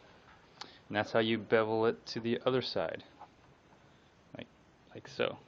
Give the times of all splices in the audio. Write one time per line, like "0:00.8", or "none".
0:02.1